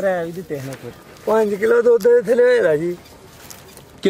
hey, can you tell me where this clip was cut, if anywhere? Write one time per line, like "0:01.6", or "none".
0:01.0